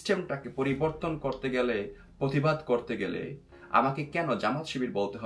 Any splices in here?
no; 0 cuts

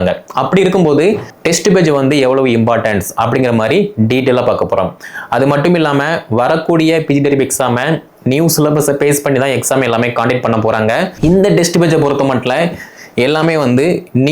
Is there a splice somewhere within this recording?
yes; 2 cuts; at 1.3 s, 11.1 s

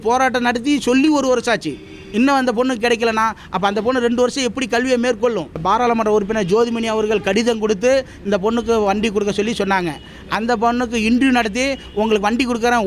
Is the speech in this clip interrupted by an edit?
yes; 1 cut; at 5.6 s

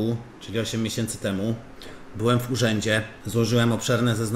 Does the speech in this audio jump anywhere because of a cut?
yes; 1 cut; at 3.2 s

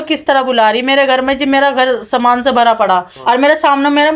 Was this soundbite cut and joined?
yes; 1 cut; at 3.1 s

